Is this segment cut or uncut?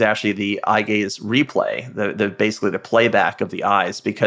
uncut